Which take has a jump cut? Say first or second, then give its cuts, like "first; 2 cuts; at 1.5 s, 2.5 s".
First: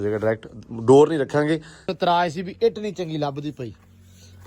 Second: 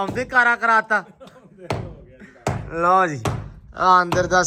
first; 1 cut; at 1.9 s